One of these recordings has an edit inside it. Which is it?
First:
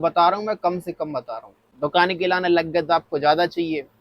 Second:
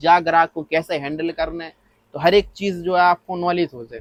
first; 1 cut; at 1.7 s

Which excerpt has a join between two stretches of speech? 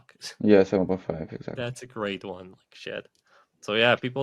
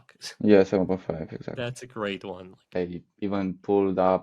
second; 1 cut; at 2.7 s

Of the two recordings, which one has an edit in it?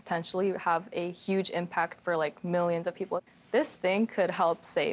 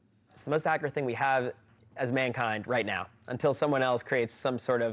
first; 1 cut; at 3.3 s

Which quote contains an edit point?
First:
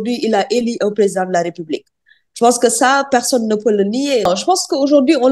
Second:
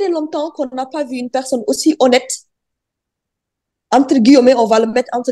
first; 1 cut; at 4.3 s

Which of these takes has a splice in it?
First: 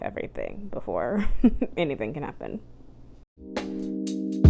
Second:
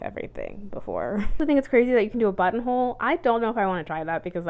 second; 1 cut; at 1.4 s

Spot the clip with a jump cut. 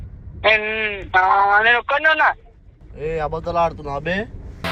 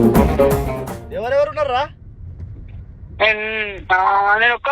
second; 1 cut; at 1.0 s

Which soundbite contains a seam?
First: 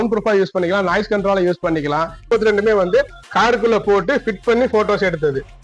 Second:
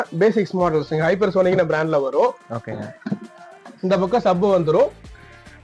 first; 1 cut; at 2.3 s

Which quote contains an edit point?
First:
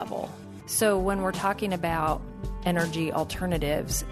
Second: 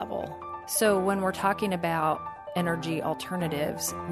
second; 1 cut; at 2.4 s

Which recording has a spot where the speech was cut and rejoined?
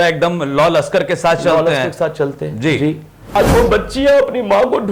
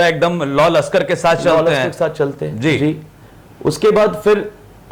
first; 1 cut; at 3.4 s

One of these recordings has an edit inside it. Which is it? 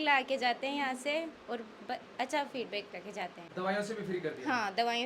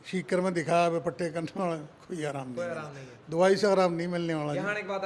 first; 1 cut; at 3.4 s

